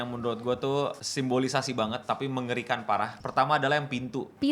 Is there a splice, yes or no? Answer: yes